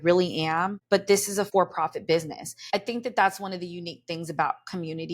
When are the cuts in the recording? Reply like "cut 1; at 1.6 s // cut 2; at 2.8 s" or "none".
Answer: cut 1; at 1.2 s // cut 2; at 2.6 s